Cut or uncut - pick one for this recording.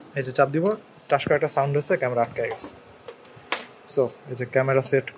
uncut